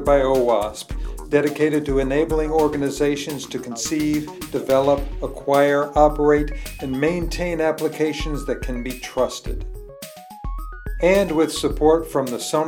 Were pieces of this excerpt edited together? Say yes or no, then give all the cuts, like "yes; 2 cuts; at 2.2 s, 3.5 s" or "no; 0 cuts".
no; 0 cuts